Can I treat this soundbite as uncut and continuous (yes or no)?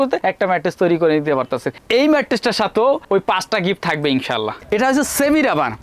no